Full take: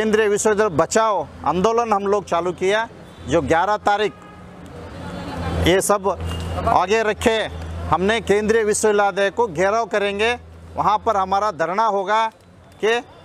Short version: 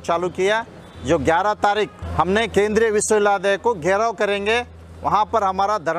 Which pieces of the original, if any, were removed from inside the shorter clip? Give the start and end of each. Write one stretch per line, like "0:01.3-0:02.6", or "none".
0:04.2-0:07.7